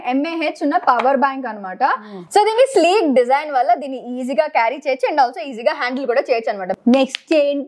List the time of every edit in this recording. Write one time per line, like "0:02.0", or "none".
0:02.1
0:06.7